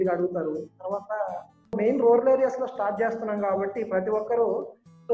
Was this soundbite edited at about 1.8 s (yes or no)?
yes